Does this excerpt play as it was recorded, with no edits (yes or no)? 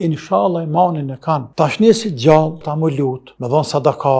no